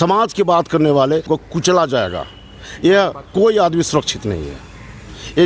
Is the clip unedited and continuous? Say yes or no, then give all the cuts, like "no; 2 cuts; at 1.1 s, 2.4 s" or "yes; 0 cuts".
no; 1 cut; at 1.3 s